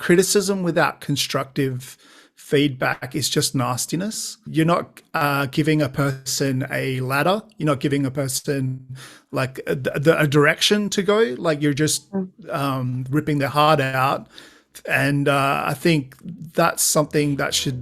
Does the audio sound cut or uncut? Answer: cut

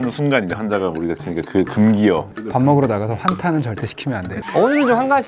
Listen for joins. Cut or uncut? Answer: cut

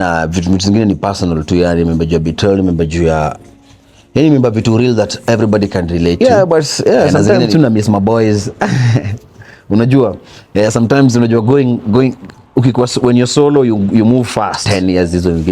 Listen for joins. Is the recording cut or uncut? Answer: cut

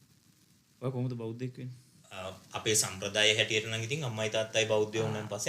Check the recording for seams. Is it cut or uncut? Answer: cut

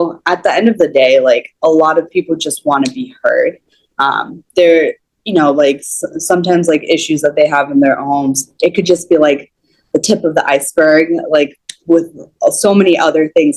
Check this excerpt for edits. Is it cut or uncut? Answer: uncut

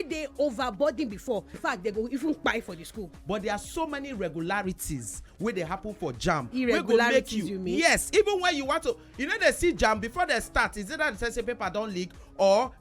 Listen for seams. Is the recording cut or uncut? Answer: cut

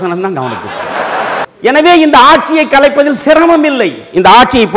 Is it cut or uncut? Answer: cut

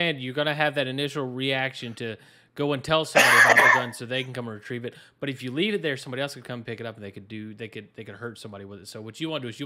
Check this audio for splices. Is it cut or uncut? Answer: uncut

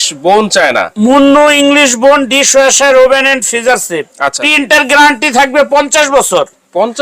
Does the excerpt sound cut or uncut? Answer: cut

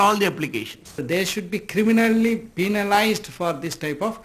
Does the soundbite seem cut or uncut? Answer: cut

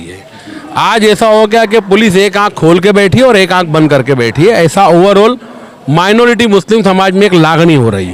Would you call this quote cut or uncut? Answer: uncut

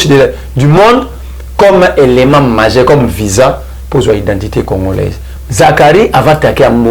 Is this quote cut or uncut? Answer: cut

